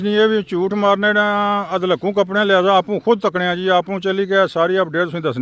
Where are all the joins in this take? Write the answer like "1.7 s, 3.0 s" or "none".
none